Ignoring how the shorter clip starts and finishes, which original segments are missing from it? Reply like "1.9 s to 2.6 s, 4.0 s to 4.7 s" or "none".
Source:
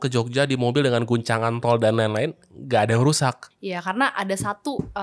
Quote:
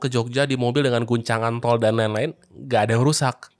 none